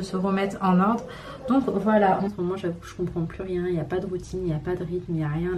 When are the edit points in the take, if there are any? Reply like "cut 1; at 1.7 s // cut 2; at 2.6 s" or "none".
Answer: cut 1; at 2.3 s